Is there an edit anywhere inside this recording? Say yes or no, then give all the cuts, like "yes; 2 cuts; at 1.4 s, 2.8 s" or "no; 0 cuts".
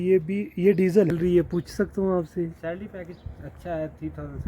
yes; 1 cut; at 1.1 s